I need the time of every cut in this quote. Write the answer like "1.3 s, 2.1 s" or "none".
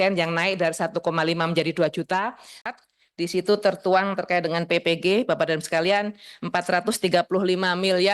2.7 s